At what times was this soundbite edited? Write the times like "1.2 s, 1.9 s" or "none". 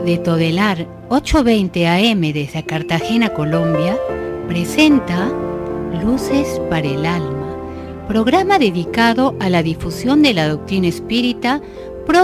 none